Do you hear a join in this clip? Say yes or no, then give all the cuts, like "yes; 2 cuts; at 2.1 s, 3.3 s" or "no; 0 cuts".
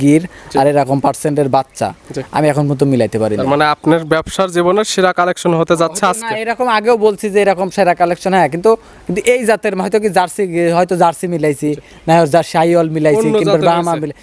no; 0 cuts